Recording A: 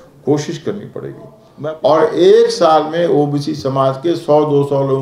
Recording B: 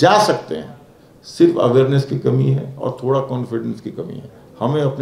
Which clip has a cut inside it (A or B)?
A